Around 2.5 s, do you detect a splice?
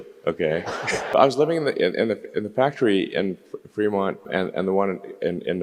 no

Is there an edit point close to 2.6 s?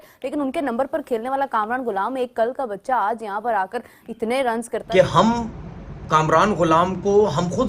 no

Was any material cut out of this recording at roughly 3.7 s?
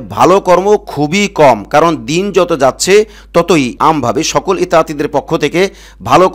yes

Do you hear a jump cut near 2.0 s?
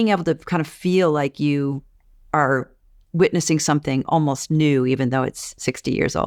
no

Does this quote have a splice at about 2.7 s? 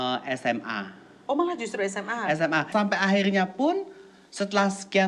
yes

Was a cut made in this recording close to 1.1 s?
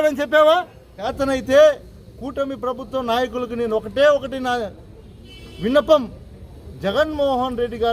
yes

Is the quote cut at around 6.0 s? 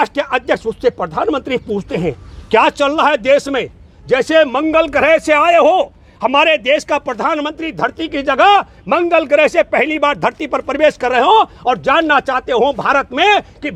no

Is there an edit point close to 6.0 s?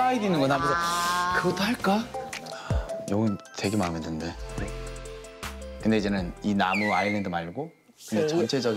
no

